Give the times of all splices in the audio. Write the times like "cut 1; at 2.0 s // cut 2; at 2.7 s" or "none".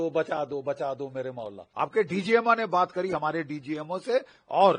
cut 1; at 1.6 s